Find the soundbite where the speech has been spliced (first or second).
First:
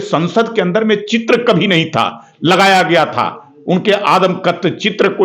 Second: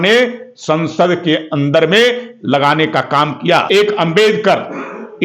second